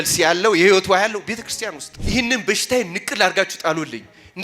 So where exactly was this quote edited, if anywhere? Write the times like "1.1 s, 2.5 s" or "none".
1.9 s